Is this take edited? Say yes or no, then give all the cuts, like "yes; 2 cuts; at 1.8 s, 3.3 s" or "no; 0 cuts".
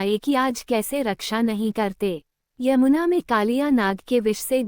yes; 2 cuts; at 1.0 s, 2.4 s